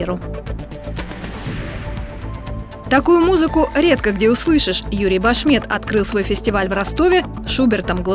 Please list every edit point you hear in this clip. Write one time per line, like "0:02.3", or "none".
none